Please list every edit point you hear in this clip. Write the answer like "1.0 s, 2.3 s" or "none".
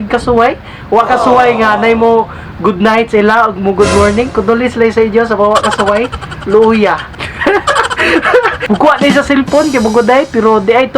7.3 s, 8.6 s